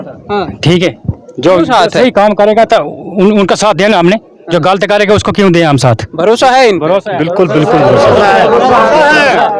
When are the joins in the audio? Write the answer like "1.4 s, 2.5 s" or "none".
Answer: none